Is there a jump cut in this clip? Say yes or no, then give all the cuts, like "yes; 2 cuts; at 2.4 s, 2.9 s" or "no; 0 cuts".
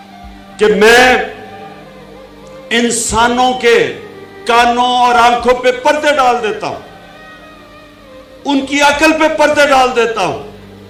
no; 0 cuts